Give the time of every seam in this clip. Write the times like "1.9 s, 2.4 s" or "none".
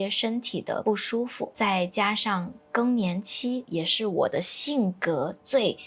0.9 s, 3.7 s